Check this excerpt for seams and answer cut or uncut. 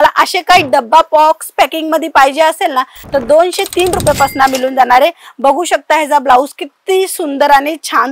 uncut